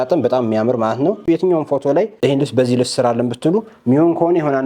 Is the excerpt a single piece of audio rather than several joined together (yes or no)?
no